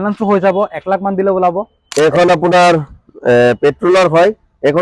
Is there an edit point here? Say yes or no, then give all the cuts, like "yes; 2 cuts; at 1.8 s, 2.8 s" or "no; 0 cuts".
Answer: yes; 1 cut; at 1.8 s